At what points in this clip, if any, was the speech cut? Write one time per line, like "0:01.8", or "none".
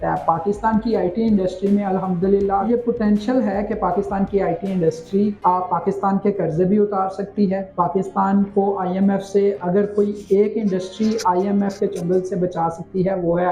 0:02.7
0:05.4
0:07.7